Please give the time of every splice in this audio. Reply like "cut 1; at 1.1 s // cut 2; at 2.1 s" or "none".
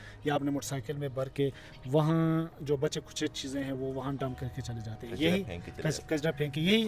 none